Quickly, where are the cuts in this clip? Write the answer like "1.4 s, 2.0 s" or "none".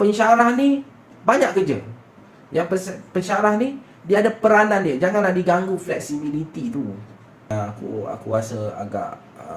7.5 s